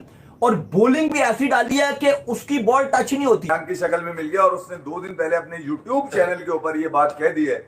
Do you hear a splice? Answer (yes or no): yes